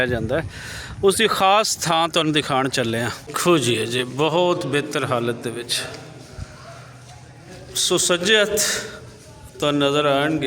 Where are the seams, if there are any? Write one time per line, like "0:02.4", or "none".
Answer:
0:03.3